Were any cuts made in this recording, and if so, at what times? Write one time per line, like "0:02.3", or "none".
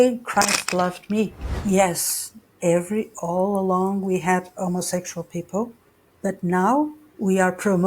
0:01.5